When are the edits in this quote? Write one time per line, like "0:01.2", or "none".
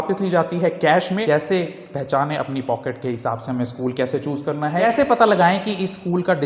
0:01.2
0:04.8